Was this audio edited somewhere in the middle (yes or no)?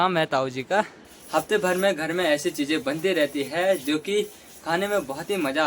yes